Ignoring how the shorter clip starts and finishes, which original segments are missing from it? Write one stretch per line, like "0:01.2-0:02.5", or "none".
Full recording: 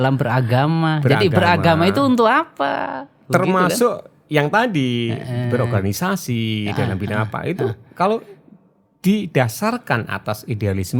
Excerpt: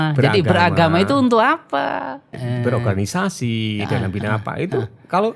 0:03.2-0:05.2